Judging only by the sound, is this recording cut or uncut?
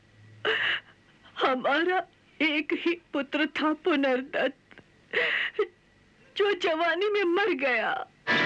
uncut